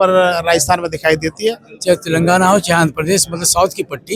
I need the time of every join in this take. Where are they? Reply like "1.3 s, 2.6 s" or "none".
1.7 s